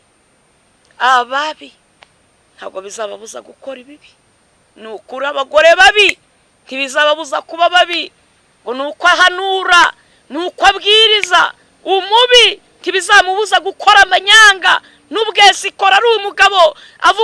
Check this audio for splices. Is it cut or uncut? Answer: uncut